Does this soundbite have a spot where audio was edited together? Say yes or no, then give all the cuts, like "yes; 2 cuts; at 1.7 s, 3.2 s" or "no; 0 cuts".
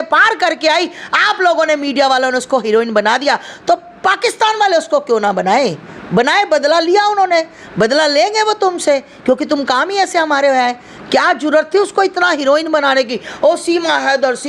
no; 0 cuts